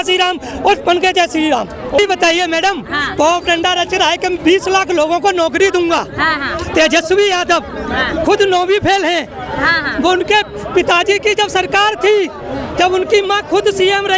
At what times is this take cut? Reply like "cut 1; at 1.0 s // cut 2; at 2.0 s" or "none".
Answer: cut 1; at 2.0 s